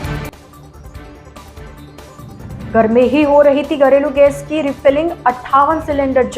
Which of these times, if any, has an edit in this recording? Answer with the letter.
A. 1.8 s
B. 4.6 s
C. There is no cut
A